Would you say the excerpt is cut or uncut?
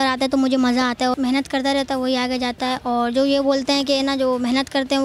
cut